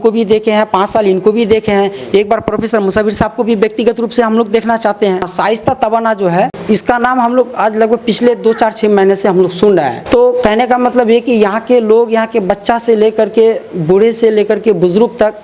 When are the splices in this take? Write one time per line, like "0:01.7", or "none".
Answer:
0:05.3
0:06.6
0:10.0